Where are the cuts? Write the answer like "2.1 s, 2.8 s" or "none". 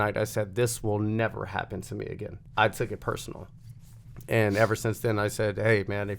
2.4 s